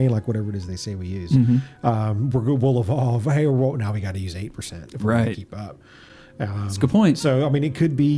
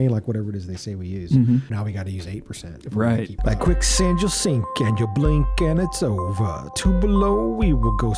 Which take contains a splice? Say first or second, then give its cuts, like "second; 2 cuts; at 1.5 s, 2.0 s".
second; 2 cuts; at 1.7 s, 3.4 s